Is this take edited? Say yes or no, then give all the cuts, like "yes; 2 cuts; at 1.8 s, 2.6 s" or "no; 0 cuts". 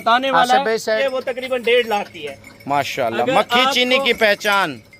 yes; 1 cut; at 1.0 s